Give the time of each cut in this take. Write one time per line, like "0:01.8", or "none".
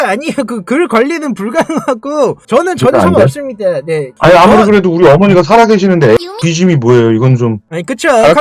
none